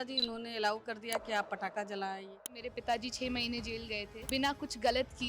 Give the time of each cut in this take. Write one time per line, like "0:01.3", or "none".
0:02.6
0:04.3